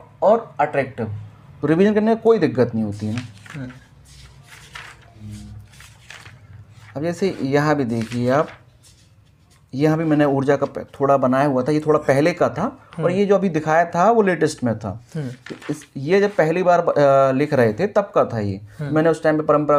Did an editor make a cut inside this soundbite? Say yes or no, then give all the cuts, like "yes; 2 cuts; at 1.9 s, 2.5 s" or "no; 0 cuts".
no; 0 cuts